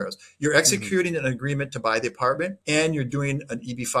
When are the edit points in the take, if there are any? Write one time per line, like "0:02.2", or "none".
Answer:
0:02.6